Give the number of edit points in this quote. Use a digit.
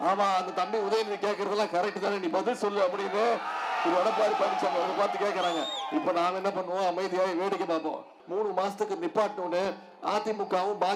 1